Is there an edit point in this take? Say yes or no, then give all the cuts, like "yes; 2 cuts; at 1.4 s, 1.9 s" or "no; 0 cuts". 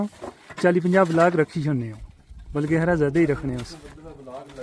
no; 0 cuts